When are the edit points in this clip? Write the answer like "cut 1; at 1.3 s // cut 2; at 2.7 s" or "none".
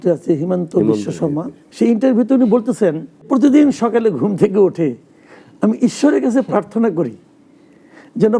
cut 1; at 1.6 s // cut 2; at 3.3 s